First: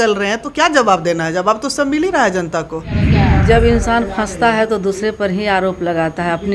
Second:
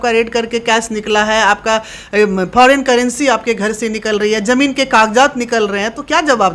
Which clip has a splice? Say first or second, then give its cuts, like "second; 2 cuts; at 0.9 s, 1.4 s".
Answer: first; 1 cut; at 3.0 s